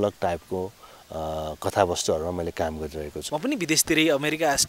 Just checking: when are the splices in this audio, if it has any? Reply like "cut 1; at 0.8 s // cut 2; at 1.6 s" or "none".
cut 1; at 3.1 s